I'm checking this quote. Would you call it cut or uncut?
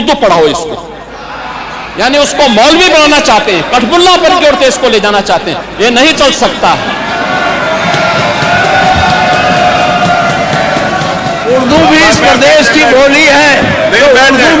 uncut